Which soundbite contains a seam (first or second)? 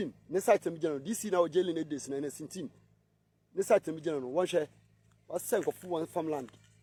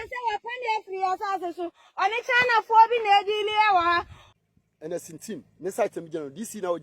second